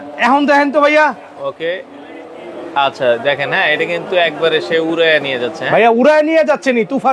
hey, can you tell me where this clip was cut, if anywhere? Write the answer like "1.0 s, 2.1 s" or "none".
none